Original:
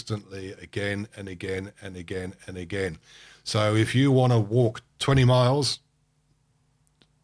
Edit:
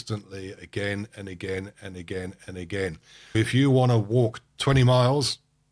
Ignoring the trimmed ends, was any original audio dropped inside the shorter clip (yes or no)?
yes